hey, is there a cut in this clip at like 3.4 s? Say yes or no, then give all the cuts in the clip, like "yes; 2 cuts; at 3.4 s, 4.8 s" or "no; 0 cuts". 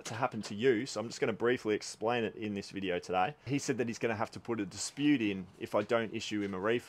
yes; 1 cut; at 3.4 s